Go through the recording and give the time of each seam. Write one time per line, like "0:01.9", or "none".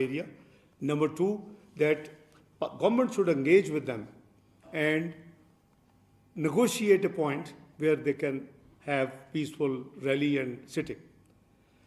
none